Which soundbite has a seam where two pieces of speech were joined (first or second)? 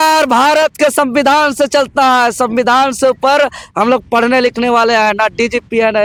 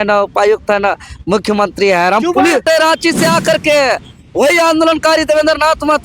second